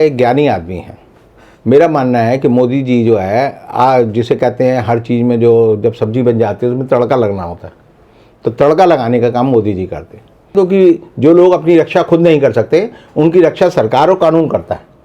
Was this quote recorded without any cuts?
no; 1 cut; at 10.5 s

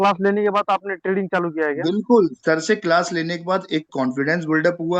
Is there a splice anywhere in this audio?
no; 0 cuts

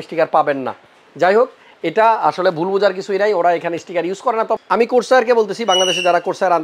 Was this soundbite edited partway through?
no; 0 cuts

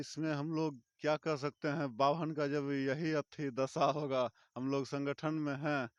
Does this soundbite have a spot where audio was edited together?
no; 0 cuts

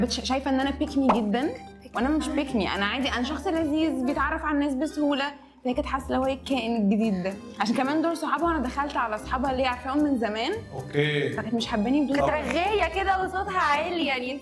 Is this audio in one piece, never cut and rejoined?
yes; 0 cuts

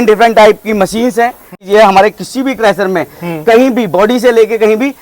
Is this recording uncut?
no; 1 cut; at 1.6 s

